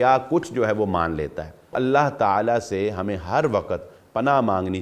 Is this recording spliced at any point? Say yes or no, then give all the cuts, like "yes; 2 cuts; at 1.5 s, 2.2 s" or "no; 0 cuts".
yes; 1 cut; at 1.7 s